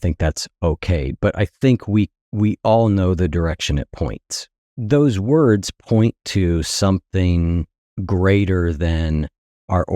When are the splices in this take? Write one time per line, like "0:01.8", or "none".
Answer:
0:04.8